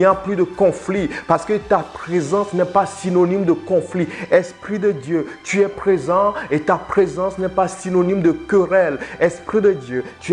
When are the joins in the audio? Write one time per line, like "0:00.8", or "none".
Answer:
none